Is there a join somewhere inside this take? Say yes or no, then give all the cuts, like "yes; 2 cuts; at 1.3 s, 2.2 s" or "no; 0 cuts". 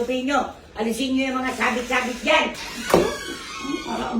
yes; 1 cut; at 2.6 s